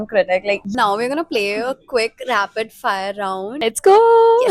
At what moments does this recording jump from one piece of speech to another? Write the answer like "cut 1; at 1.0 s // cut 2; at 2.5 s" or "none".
cut 1; at 0.7 s // cut 2; at 3.6 s